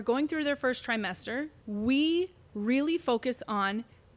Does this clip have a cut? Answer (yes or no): yes